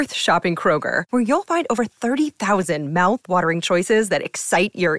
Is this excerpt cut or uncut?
uncut